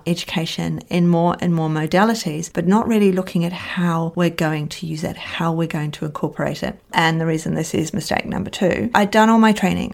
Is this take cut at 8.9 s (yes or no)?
yes